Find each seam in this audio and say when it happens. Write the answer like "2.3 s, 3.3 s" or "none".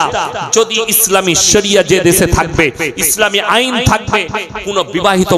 none